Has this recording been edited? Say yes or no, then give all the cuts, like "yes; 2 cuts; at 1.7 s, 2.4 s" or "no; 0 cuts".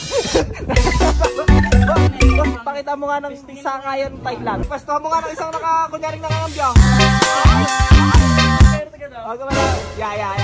yes; 1 cut; at 4.6 s